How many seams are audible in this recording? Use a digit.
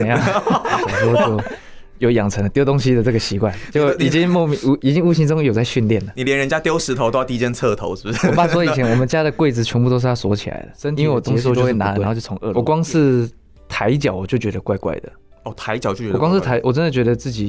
2